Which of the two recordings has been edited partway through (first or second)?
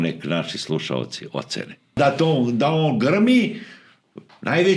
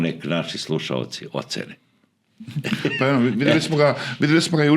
first